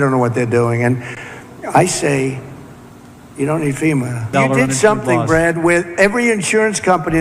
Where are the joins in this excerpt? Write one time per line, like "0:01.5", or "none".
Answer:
0:04.3